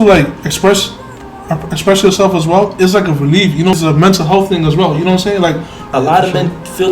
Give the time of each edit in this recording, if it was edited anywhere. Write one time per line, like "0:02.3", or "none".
0:03.7
0:05.8